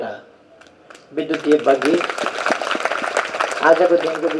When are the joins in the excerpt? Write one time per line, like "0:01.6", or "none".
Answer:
none